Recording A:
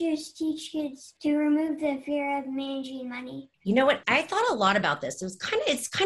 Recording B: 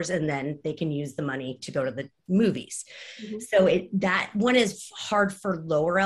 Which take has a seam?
A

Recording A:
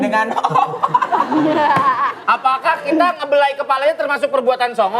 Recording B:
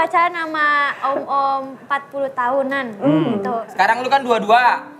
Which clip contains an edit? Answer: B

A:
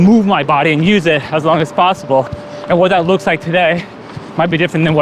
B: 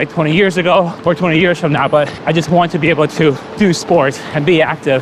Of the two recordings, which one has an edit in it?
B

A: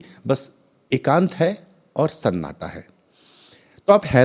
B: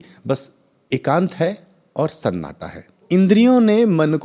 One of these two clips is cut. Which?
B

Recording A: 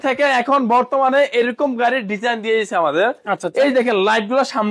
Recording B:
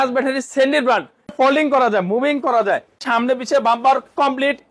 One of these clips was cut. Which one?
B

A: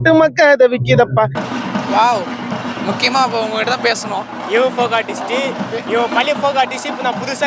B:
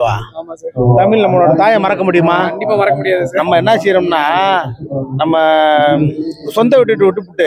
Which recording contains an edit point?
A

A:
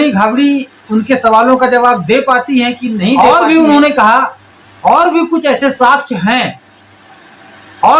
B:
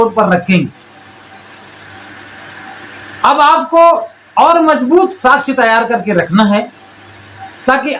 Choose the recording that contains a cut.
A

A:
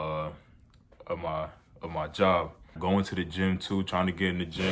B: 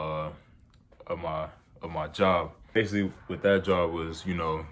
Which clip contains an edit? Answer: A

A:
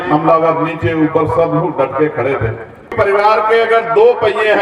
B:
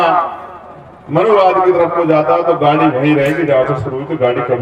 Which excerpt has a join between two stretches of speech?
A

